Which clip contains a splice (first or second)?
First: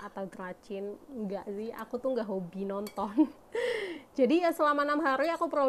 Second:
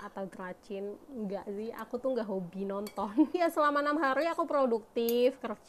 second